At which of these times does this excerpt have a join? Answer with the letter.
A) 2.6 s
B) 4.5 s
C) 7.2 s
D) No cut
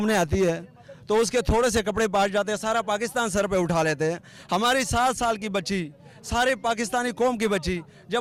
D